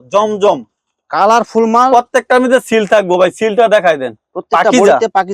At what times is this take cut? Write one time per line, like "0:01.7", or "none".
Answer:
none